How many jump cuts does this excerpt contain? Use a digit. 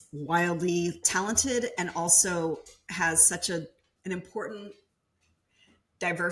2